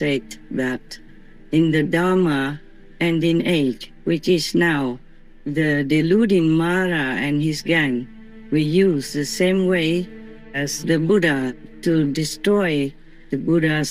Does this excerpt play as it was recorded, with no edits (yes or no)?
yes